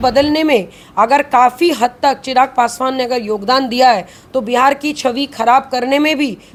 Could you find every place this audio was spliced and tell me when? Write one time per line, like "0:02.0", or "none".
none